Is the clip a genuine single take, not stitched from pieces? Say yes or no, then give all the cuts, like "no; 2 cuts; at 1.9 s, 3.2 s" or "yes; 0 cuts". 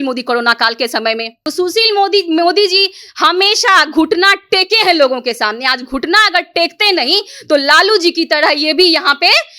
no; 1 cut; at 1.4 s